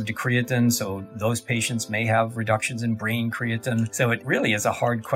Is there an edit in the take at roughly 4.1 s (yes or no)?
yes